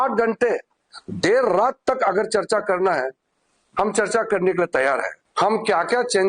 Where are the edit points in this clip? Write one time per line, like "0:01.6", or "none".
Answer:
0:05.2